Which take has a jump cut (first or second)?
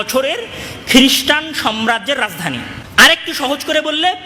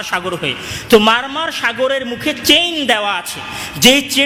first